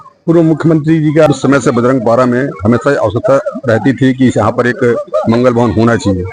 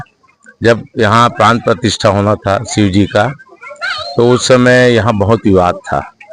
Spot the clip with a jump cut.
first; 1 cut; at 1.3 s

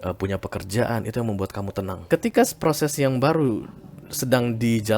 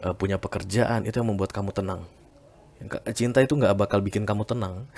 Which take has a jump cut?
first; 1 cut; at 2.0 s

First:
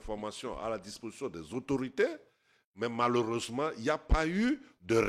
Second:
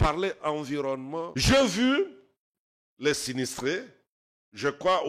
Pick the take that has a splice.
second; 1 cut; at 1.3 s

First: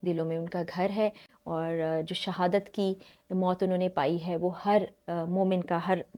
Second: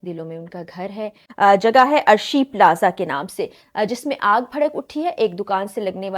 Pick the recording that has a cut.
second; 1 cut; at 1.2 s

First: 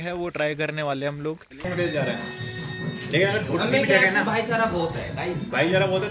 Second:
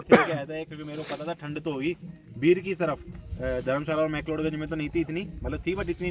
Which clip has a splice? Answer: first; 1 cut; at 1.6 s

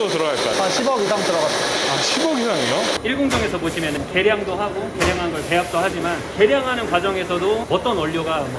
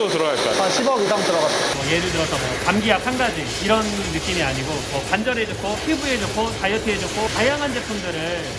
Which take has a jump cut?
second; 2 cuts; at 1.7 s, 7.3 s

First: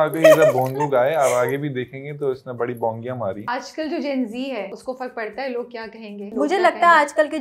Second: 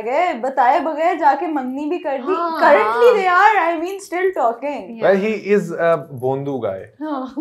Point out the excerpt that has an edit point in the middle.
first; 3 cuts; at 3.4 s, 4.8 s, 6.3 s

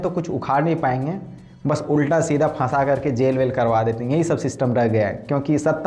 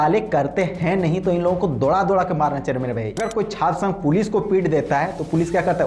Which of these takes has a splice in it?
second; 1 cut; at 3.2 s

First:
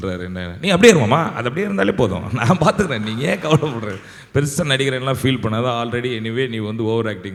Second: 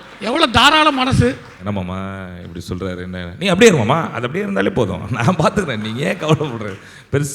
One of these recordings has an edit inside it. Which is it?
second; 1 cut; at 1.6 s

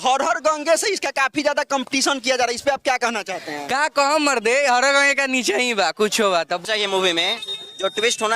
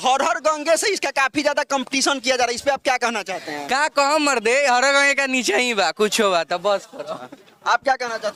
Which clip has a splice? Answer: first; 1 cut; at 6.6 s

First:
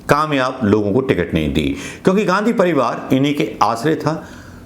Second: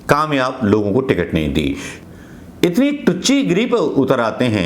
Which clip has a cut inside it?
second; 1 cut; at 1.9 s

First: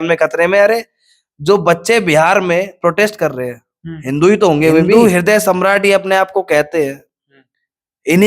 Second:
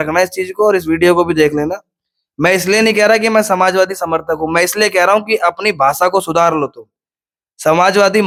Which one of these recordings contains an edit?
first; 1 cut; at 4.9 s

